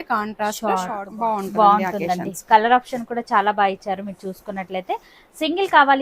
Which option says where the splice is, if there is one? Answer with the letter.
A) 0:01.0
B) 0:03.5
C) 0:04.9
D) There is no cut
A